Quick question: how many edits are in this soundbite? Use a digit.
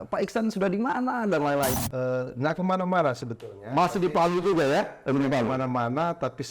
1